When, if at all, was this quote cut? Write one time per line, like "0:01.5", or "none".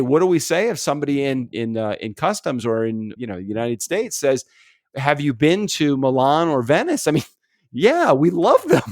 0:01.5
0:03.1